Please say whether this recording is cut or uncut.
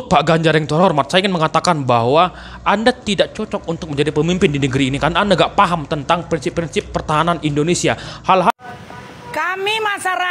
cut